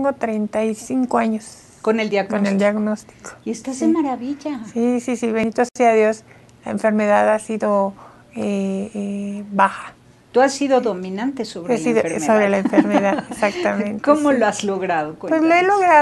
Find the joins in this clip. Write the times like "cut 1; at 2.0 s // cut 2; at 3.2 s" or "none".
cut 1; at 5.4 s

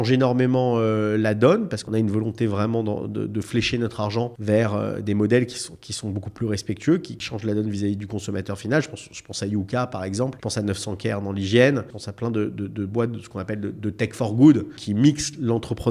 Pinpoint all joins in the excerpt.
cut 1; at 1.8 s // cut 2; at 4.4 s // cut 3; at 7.2 s // cut 4; at 10.4 s // cut 5; at 12.0 s // cut 6; at 14.8 s

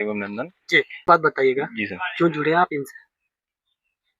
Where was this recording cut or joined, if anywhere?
cut 1; at 1.0 s

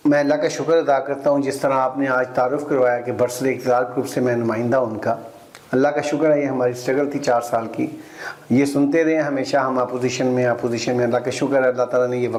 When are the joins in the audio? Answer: none

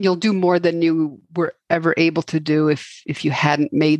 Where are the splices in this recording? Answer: none

